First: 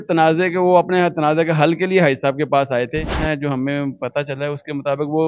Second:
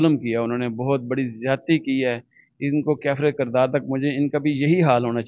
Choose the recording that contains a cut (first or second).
first